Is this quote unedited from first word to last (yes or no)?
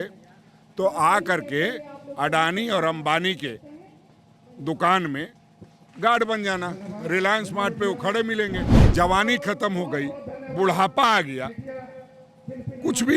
no